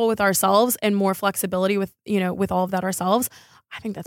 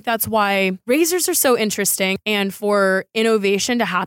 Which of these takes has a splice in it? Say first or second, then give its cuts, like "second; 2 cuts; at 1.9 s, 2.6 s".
second; 2 cuts; at 0.8 s, 2.1 s